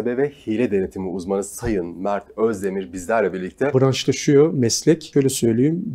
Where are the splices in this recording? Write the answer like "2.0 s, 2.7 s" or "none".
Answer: 3.7 s, 5.1 s